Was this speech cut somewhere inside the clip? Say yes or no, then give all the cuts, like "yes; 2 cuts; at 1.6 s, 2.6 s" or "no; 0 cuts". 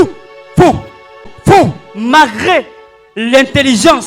yes; 1 cut; at 1.3 s